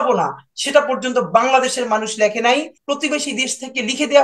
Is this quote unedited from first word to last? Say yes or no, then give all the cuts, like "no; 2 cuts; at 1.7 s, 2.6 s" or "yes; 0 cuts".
no; 1 cut; at 2.8 s